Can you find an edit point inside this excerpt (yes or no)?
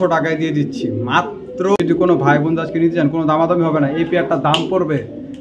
yes